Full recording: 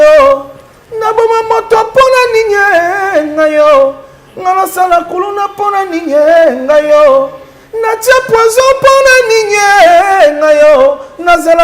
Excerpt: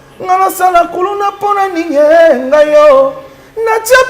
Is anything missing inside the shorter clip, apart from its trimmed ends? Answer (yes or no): no